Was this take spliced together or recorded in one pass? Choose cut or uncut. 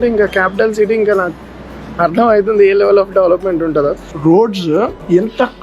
cut